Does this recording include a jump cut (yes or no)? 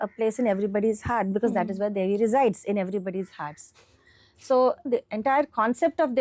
yes